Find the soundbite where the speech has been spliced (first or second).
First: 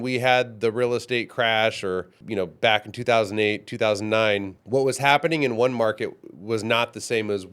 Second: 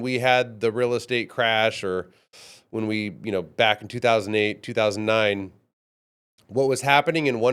first